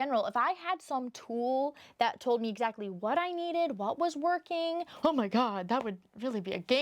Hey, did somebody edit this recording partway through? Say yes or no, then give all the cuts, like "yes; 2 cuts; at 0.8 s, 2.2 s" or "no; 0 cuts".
yes; 1 cut; at 4.9 s